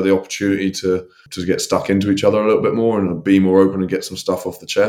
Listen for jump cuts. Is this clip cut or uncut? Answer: cut